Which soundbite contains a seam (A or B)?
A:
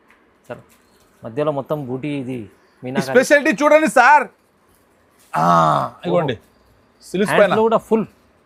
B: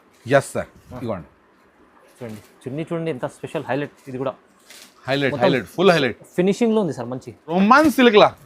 B